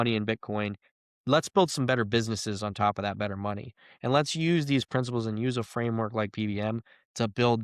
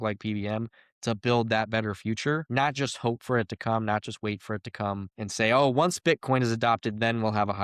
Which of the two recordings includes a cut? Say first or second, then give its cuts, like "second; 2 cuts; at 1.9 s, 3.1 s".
second; 2 cuts; at 2.4 s, 5.2 s